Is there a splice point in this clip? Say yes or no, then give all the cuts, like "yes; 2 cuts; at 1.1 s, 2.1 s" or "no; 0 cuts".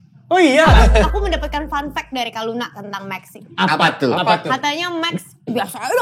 yes; 1 cut; at 1.1 s